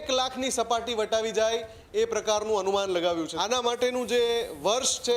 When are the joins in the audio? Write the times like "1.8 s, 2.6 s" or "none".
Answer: 3.3 s